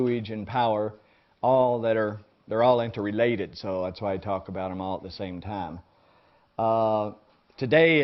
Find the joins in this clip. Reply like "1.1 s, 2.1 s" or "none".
none